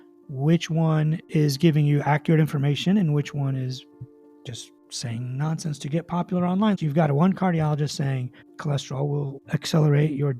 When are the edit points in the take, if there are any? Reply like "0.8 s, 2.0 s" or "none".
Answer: 6.8 s, 9.4 s